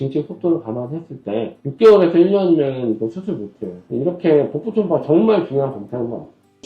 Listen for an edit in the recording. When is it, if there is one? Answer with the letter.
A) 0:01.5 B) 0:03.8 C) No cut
B